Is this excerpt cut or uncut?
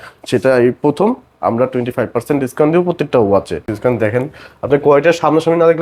cut